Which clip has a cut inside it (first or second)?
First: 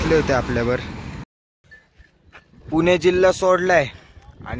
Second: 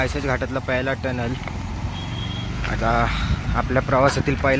first